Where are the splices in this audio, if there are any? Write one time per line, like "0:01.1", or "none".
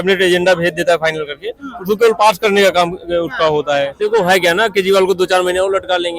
0:03.9